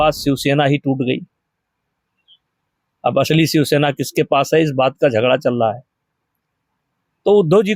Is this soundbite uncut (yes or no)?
yes